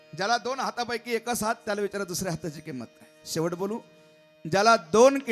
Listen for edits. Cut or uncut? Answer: uncut